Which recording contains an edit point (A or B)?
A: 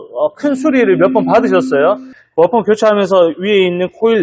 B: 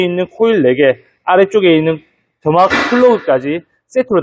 A